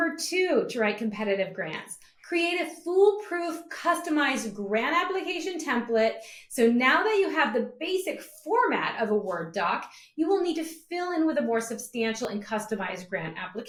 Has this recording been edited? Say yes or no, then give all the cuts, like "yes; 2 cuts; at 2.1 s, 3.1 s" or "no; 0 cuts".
no; 0 cuts